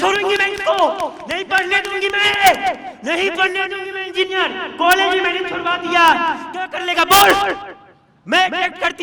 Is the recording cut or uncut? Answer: uncut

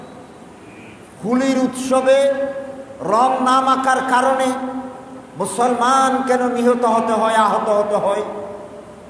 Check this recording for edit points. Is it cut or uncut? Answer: uncut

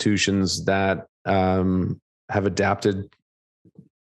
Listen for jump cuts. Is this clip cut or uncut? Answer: uncut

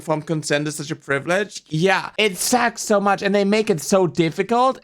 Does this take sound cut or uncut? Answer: cut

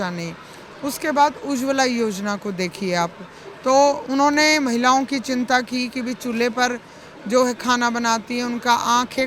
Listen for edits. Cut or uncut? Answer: uncut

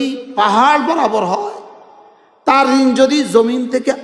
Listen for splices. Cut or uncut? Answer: uncut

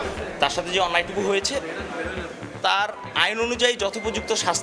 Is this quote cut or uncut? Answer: uncut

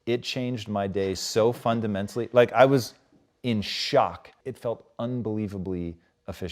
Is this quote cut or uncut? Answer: cut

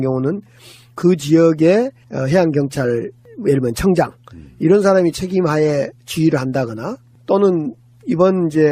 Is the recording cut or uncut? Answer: cut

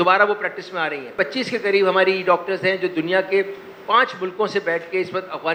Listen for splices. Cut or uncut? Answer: uncut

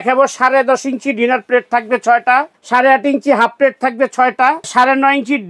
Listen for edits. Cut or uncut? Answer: cut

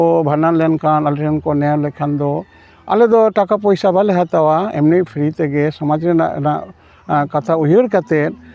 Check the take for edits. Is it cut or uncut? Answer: uncut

